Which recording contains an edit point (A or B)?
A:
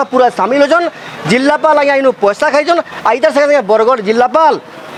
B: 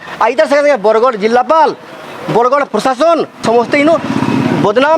B